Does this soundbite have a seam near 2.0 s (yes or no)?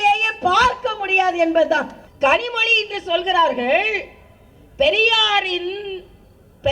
yes